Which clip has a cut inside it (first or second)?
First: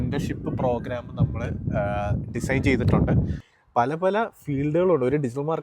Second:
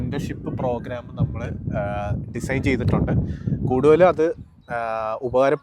first